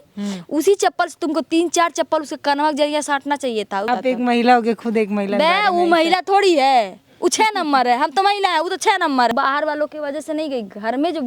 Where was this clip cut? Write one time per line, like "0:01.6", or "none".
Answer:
0:03.9
0:09.3